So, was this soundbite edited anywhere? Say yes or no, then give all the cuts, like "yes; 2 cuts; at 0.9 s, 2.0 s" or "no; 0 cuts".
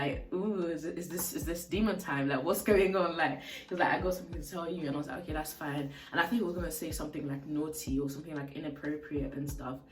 no; 0 cuts